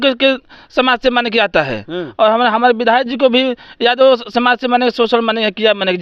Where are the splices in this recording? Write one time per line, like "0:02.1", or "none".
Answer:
none